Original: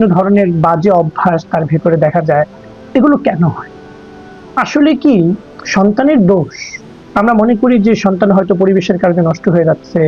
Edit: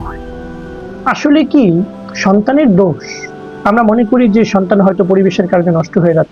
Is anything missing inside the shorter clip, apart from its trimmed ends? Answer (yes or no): no